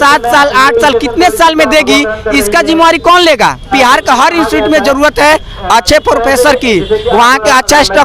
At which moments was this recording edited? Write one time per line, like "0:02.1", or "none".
0:03.7